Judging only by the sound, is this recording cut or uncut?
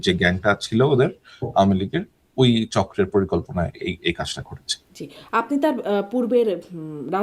uncut